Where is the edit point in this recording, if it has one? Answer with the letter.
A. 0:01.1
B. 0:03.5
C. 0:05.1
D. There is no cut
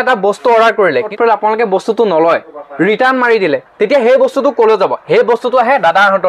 A